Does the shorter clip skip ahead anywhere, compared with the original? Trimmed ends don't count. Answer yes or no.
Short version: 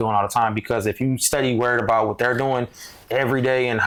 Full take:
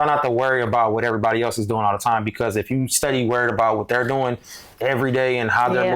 no